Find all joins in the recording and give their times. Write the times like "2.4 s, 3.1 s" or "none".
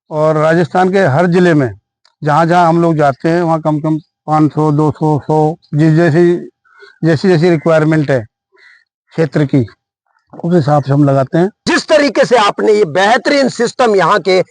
11.6 s